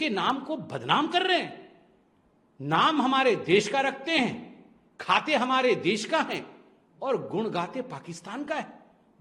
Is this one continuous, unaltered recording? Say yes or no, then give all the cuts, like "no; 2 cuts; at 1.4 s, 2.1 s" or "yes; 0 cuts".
yes; 0 cuts